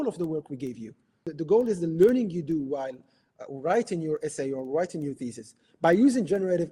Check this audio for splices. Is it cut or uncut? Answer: cut